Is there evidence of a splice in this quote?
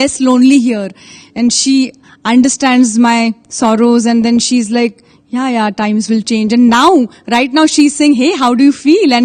no; 0 cuts

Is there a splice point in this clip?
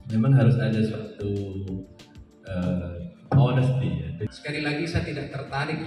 yes; 1 cut; at 4.2 s

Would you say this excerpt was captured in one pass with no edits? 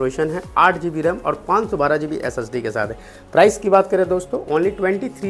yes; 0 cuts

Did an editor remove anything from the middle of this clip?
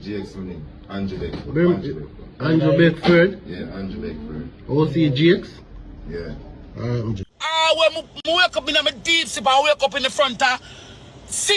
yes; 1 cut; at 7.3 s

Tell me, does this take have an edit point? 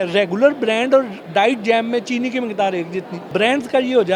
yes; 1 cut; at 3.2 s

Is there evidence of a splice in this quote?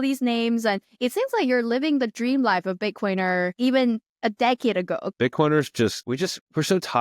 yes; 2 cuts; at 5.1 s, 6.0 s

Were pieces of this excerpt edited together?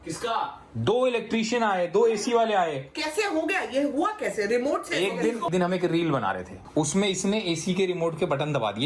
yes; 2 cuts; at 5.5 s, 6.6 s

